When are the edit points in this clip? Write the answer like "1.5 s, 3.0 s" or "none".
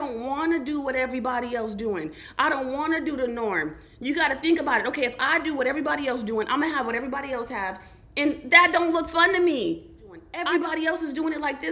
10.3 s